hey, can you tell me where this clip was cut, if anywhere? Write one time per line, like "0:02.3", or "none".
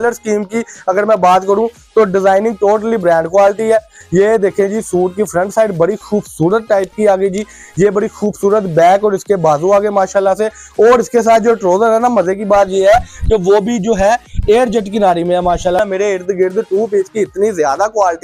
0:15.8